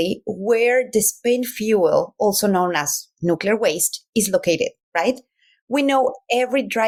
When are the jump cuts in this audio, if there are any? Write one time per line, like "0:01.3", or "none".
none